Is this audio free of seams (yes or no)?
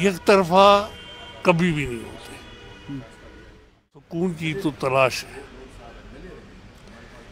no